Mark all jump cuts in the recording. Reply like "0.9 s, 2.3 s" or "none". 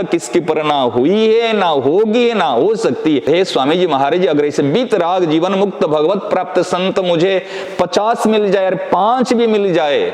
3.2 s